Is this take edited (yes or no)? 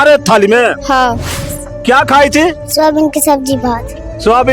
yes